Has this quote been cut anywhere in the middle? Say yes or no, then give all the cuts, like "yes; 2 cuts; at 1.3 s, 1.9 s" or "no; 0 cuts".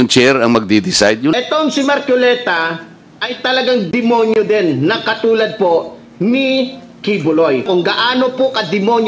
yes; 2 cuts; at 1.3 s, 7.7 s